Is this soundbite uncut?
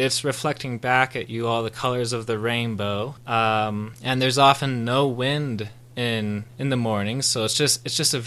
yes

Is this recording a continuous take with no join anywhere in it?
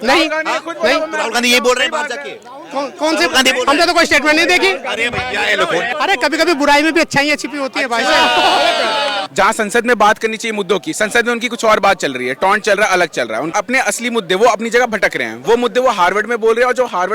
no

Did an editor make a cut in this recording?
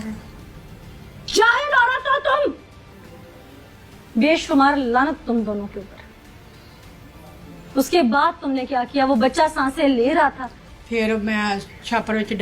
yes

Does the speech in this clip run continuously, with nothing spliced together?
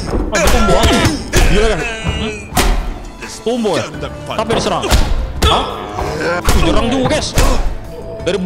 yes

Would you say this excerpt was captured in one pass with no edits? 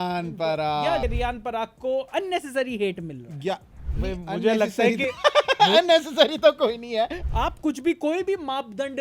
no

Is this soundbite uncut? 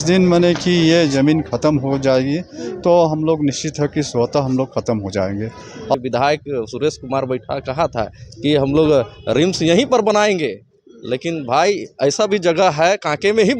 no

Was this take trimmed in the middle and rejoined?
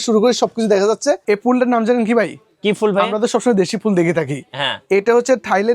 yes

